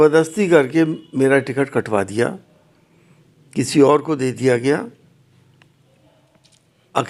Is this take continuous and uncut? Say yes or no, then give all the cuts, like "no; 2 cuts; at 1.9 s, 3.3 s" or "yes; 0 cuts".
yes; 0 cuts